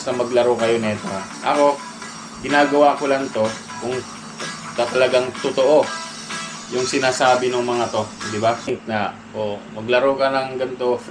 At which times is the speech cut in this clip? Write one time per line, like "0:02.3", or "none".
0:08.7